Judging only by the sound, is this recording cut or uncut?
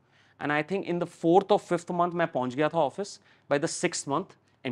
uncut